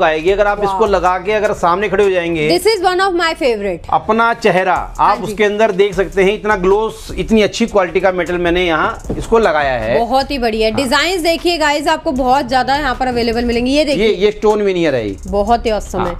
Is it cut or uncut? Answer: uncut